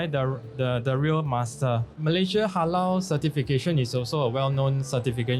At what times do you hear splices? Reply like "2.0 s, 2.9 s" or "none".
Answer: 1.9 s